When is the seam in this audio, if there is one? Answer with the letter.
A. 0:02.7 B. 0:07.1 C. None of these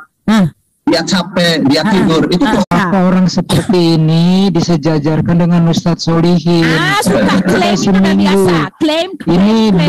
A